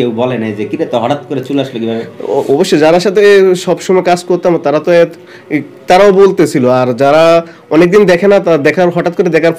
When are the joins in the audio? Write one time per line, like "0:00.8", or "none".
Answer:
none